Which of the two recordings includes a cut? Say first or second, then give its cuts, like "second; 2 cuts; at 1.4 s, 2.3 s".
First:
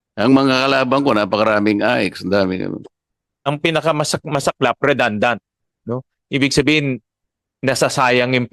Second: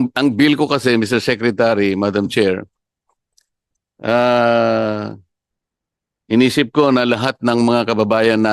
first; 1 cut; at 3.3 s